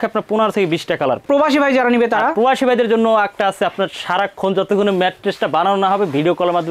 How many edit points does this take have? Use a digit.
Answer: 1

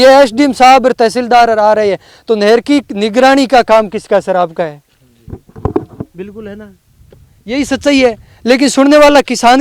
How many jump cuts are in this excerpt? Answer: 0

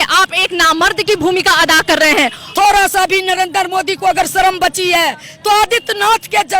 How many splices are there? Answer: 1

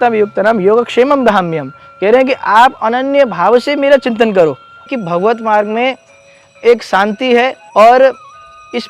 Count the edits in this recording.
2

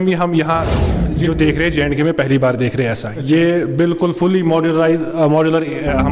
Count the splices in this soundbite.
0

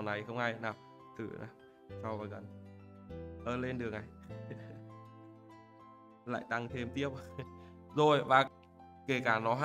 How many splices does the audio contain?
1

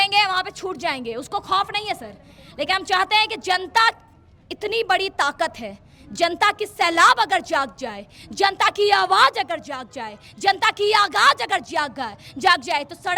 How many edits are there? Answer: 0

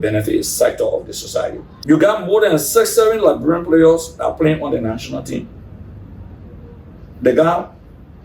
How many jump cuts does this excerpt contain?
1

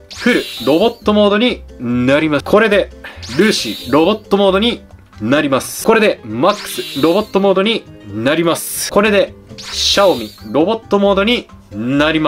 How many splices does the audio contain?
3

